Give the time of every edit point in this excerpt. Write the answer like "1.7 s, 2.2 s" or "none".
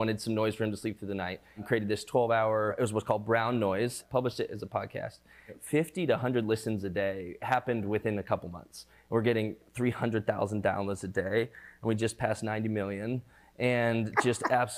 1.6 s, 2.8 s, 4.0 s, 5.5 s, 8.9 s

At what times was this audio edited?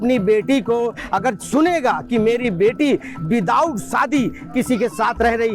none

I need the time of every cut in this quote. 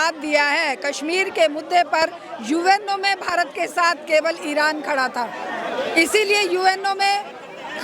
none

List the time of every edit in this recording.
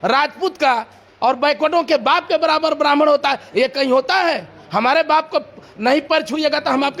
none

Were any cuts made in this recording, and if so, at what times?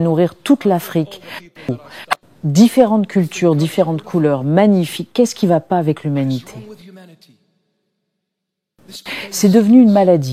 1.7 s, 6.6 s

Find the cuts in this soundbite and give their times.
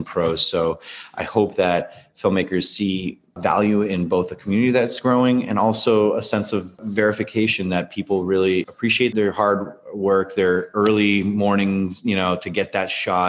none

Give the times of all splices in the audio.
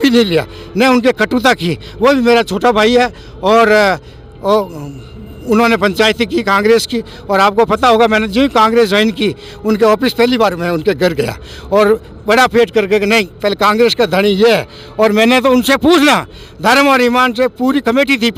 none

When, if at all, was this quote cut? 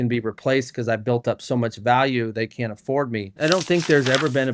3.4 s

